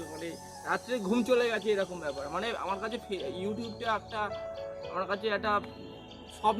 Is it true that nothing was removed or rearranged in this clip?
yes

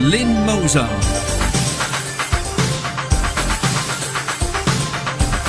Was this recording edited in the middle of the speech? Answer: no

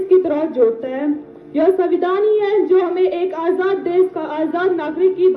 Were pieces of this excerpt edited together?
no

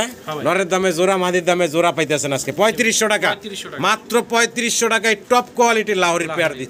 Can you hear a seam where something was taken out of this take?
no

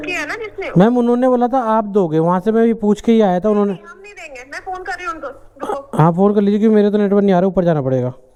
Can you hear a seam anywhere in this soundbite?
no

